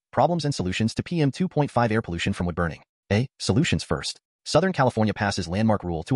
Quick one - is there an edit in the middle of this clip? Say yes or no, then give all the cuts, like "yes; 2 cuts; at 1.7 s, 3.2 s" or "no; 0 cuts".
no; 0 cuts